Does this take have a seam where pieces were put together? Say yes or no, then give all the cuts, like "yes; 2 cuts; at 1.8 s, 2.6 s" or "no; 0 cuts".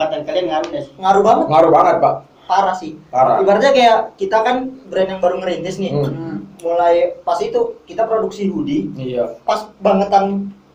no; 0 cuts